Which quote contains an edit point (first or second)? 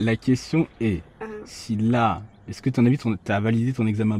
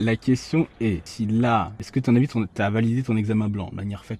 second